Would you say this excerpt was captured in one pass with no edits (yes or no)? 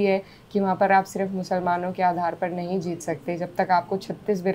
yes